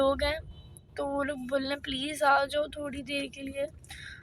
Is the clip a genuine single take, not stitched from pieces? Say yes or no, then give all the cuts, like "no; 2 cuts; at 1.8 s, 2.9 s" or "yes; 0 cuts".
yes; 0 cuts